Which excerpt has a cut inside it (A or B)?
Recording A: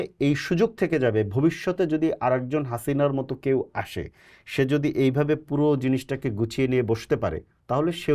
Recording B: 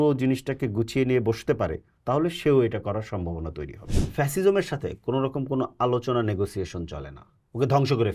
B